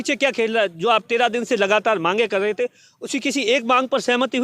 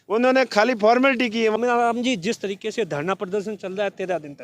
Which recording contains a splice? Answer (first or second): second